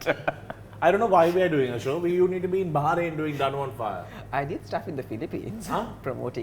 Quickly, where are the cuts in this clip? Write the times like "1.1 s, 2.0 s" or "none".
none